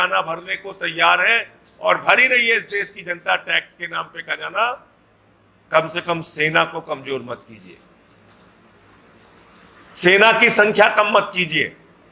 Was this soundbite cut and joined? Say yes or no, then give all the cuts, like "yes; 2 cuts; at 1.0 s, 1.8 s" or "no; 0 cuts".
no; 0 cuts